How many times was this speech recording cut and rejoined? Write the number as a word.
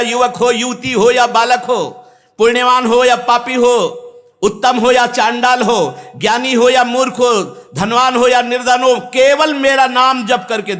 zero